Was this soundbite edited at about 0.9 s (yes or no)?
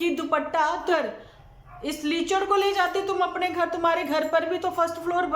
yes